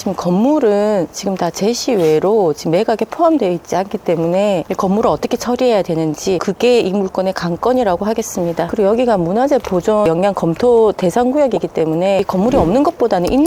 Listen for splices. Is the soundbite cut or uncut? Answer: uncut